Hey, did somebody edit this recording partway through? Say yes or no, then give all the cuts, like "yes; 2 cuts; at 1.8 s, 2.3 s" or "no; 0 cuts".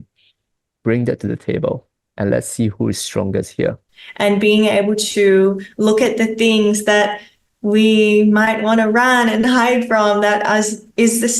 yes; 1 cut; at 3.8 s